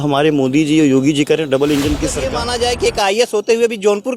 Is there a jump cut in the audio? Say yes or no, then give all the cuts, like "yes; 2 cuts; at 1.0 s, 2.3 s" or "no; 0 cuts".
yes; 1 cut; at 2.3 s